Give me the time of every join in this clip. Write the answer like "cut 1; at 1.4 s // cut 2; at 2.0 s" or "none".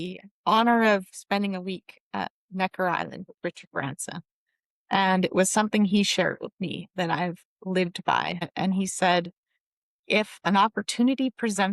cut 1; at 1.2 s // cut 2; at 8.5 s